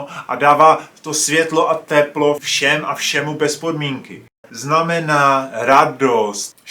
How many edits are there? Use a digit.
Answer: 1